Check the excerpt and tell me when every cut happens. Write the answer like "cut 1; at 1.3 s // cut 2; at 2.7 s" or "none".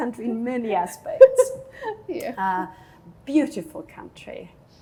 none